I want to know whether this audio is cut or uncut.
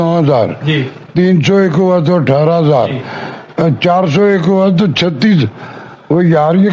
uncut